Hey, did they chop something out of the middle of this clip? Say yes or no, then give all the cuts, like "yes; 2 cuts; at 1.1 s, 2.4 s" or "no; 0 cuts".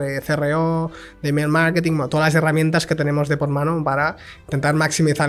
no; 0 cuts